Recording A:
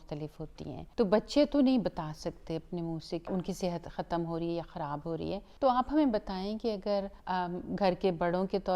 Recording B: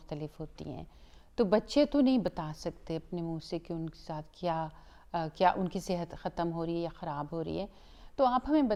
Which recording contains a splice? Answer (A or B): A